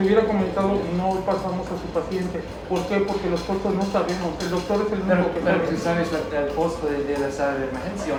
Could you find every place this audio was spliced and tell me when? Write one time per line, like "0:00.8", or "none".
none